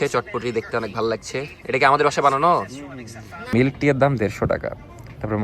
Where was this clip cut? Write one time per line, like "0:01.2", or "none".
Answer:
0:03.5